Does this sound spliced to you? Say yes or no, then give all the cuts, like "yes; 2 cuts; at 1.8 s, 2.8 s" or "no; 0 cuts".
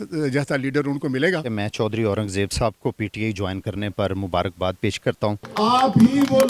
yes; 2 cuts; at 1.4 s, 5.4 s